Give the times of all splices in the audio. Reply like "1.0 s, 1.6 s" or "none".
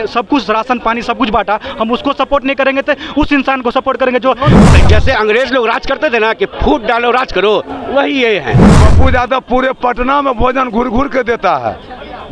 4.8 s, 8.8 s